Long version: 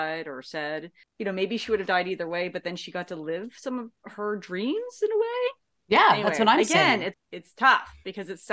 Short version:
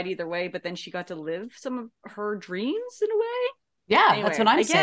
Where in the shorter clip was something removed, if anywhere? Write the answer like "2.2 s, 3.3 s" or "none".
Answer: none